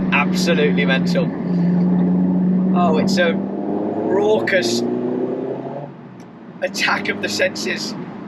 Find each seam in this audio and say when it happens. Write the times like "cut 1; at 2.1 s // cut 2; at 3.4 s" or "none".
none